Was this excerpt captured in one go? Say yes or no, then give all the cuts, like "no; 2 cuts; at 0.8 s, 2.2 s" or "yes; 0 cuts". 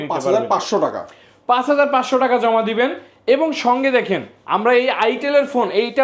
yes; 0 cuts